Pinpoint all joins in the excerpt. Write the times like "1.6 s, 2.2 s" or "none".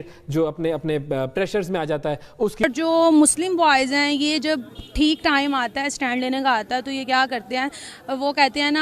2.6 s